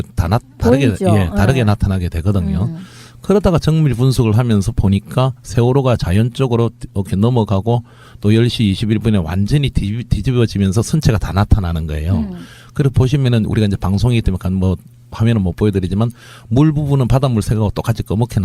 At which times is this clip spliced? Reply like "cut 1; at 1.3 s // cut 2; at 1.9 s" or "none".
cut 1; at 5.0 s

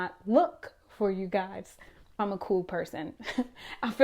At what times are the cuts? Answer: cut 1; at 2.2 s

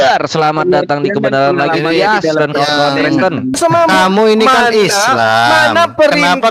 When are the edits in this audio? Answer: cut 1; at 3.6 s

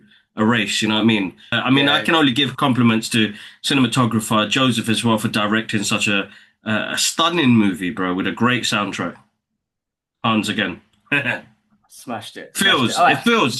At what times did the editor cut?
cut 1; at 1.6 s

